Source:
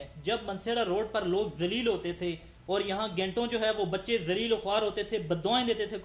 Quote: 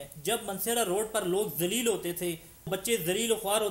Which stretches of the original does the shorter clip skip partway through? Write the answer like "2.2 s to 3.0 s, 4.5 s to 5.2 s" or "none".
2.7 s to 3.9 s